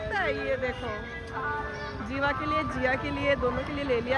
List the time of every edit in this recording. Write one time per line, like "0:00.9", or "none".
none